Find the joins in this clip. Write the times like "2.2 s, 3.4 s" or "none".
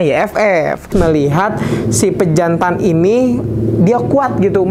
0.9 s